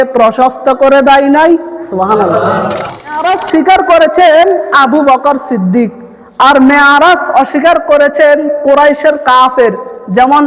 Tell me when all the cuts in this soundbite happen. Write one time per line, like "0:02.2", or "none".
0:03.2